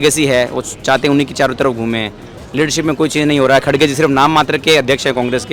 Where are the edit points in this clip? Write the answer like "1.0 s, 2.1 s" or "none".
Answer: none